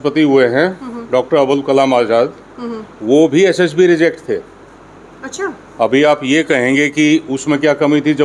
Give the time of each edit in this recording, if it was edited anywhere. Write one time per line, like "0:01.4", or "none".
none